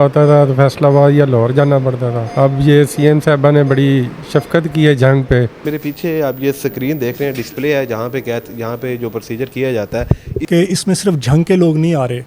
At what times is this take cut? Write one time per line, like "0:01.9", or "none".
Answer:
0:02.2
0:05.6
0:10.3